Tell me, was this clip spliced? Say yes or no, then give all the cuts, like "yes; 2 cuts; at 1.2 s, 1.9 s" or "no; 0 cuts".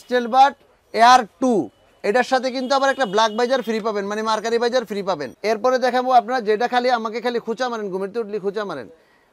yes; 1 cut; at 5.3 s